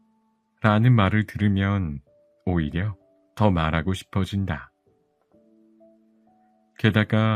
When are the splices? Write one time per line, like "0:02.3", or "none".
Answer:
0:04.7
0:06.4